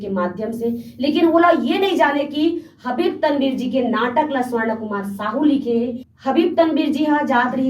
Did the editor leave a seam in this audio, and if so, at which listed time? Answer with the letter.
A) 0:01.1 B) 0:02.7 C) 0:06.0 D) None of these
C